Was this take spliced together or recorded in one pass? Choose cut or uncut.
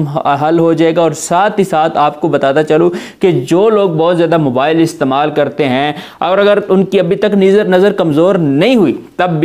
uncut